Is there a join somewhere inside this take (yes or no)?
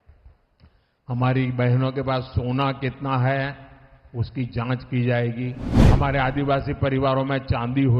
yes